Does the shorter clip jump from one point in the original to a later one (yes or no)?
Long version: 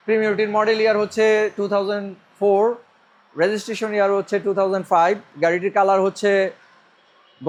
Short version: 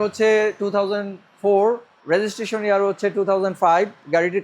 yes